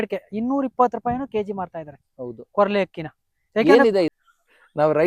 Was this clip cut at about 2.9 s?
no; 1 cut; at 4.1 s

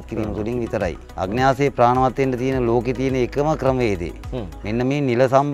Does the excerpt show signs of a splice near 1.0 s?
yes; 1 cut; at 1.0 s

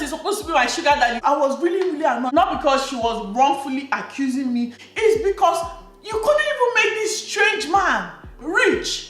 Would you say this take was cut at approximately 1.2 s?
yes; 1 cut; at 1.2 s

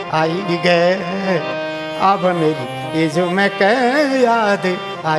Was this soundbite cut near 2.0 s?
no; 0 cuts

